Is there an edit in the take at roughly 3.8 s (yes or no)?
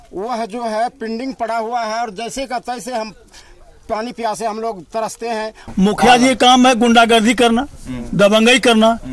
no